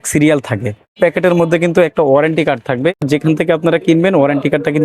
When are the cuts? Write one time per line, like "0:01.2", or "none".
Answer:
0:01.0
0:02.9